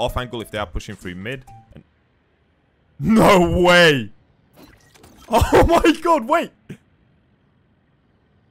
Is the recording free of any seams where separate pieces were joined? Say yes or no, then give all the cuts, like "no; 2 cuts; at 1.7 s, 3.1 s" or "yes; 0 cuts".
yes; 0 cuts